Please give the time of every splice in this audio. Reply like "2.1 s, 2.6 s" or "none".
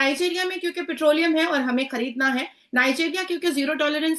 none